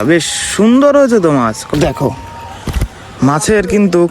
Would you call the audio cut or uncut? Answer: cut